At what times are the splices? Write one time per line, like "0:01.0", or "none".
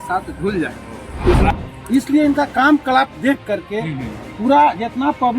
0:01.5